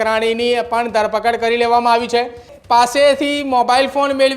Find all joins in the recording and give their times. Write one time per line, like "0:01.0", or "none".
0:02.5